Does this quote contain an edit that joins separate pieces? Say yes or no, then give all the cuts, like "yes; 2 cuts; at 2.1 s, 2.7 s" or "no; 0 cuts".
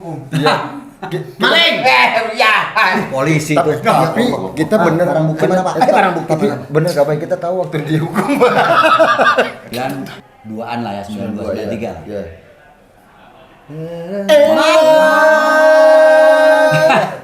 yes; 1 cut; at 9.7 s